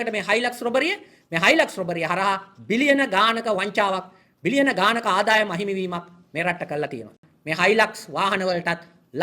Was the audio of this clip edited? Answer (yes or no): yes